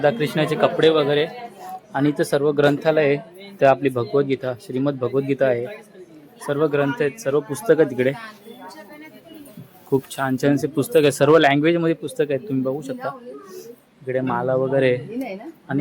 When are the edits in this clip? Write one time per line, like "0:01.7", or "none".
none